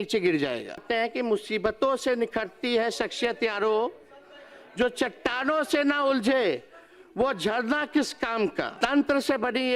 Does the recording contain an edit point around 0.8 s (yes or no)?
yes